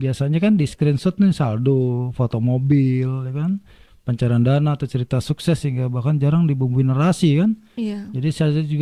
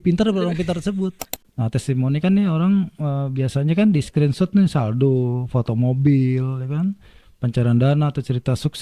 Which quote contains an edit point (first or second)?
second